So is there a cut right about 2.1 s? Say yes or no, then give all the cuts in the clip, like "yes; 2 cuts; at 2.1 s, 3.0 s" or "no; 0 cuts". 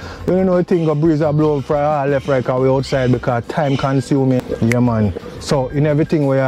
no; 1 cut; at 4.4 s